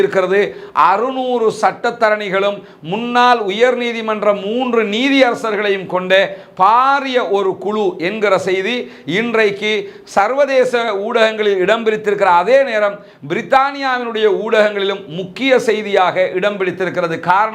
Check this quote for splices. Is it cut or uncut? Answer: uncut